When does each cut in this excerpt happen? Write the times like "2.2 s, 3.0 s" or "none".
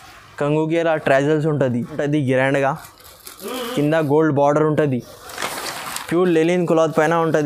2.0 s